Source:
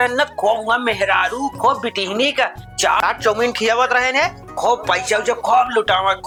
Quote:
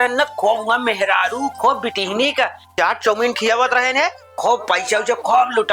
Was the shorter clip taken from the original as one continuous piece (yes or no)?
no